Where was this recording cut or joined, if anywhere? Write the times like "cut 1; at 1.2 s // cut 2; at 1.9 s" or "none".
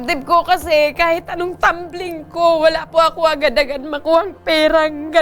none